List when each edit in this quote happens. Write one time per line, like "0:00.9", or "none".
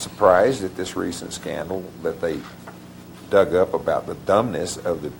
none